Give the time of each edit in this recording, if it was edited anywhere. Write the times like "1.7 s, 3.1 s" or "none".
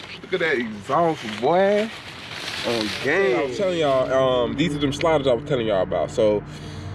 3.5 s